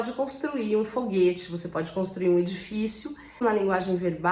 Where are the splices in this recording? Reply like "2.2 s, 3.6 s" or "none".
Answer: 3.4 s